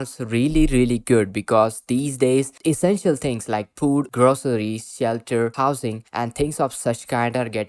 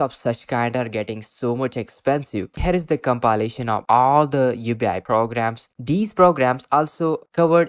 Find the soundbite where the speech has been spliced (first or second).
second